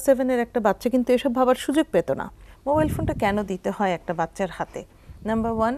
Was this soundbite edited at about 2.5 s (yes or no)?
yes